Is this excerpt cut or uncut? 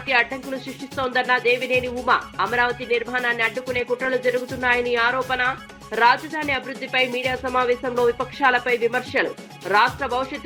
uncut